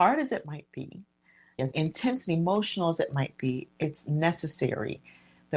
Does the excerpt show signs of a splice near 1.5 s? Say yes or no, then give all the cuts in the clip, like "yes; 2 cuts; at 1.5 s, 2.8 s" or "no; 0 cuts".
yes; 1 cut; at 1.5 s